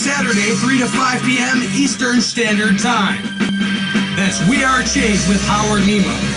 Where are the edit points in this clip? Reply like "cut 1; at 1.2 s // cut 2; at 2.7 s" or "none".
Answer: cut 1; at 2.7 s